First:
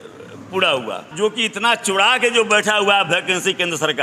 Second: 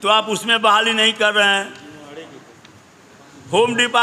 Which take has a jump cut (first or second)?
first